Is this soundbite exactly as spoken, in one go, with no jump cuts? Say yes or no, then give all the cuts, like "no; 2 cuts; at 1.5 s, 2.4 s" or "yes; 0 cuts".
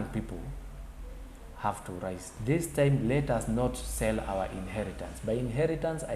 no; 1 cut; at 2.3 s